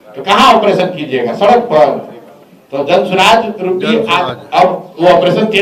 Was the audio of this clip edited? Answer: no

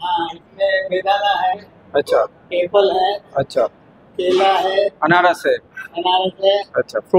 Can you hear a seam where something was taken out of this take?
no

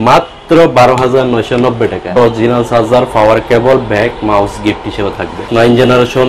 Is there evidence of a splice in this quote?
yes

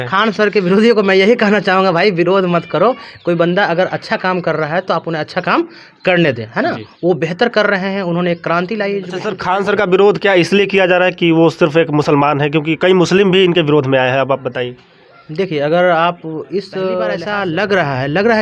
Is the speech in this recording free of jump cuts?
no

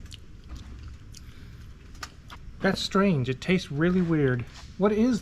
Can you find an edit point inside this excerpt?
yes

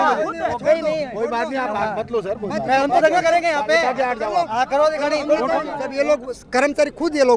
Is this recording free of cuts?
no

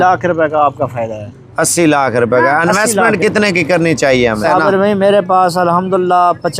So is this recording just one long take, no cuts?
no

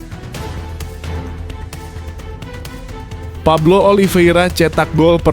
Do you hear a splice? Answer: yes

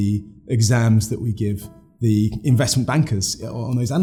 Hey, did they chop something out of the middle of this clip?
no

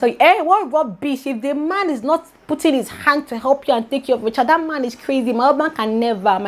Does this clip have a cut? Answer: no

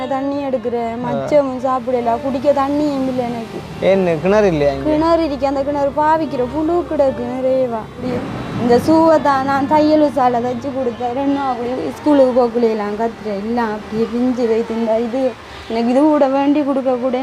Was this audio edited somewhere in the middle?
yes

